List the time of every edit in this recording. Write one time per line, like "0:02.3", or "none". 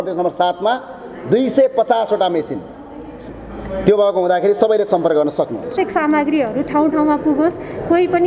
0:05.7